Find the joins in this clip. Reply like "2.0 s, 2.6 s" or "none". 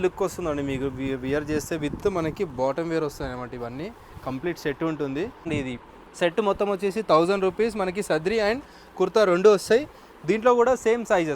5.5 s